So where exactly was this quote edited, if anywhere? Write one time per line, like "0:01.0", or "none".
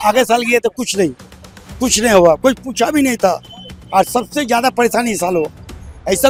none